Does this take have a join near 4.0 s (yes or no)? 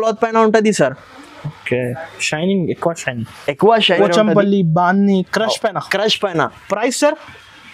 yes